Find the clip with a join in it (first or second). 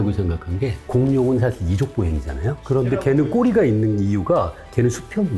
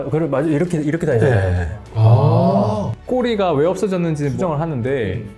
second